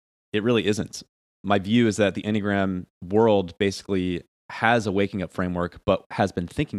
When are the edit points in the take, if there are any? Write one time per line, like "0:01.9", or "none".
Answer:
0:01.2